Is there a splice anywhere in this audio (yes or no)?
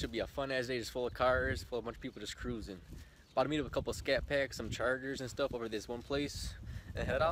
no